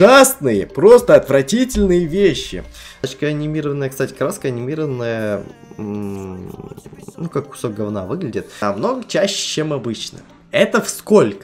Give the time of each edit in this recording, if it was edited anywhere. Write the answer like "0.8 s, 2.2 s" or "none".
3.0 s, 8.6 s